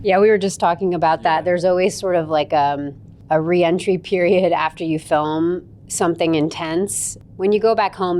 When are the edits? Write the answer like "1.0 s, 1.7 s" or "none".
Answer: 7.2 s